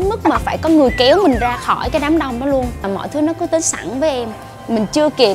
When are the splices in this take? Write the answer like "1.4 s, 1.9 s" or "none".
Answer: 2.8 s

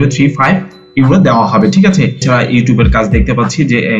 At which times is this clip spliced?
2.2 s

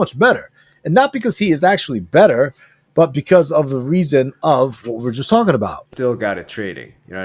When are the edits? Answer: 5.9 s

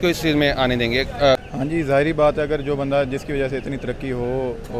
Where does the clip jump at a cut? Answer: 1.5 s

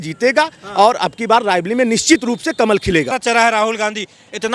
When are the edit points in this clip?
3.1 s

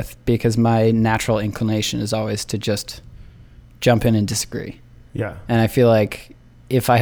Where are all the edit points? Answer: none

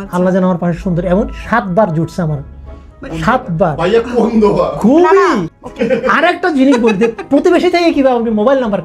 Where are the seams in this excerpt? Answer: 5.5 s

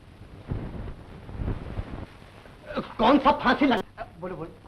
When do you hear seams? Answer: 3.8 s

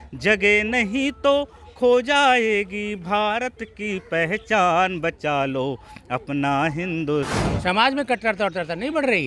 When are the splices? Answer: 7.4 s

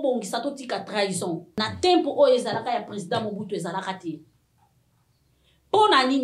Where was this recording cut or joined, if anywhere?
1.6 s

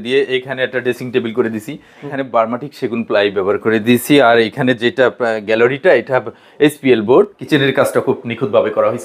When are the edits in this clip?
2.0 s, 7.4 s

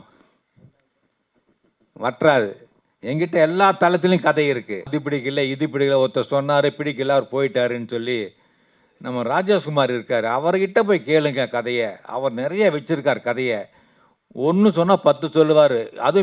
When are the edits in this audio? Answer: 4.9 s

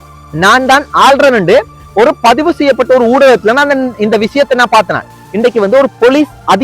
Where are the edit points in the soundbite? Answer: 5.2 s

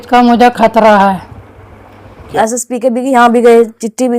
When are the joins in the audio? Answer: 2.3 s

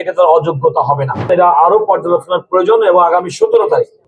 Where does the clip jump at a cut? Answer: 1.3 s

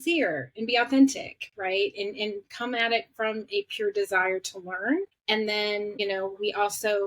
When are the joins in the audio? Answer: 5.6 s

